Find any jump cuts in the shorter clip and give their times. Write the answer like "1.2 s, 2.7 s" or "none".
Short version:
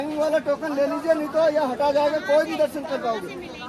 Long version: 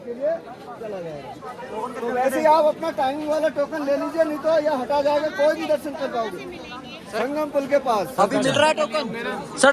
none